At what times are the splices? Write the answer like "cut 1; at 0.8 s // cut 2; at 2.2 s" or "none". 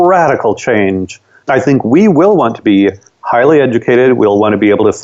none